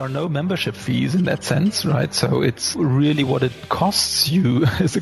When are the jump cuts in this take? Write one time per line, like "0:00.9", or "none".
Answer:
0:02.7